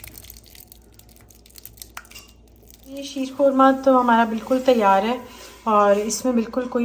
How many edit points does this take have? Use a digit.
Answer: 0